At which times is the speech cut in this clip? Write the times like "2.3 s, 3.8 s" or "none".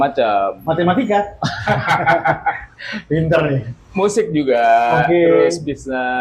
none